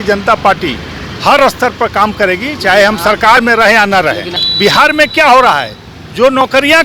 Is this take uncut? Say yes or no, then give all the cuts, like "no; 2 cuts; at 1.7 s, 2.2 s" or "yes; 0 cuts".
no; 1 cut; at 4.4 s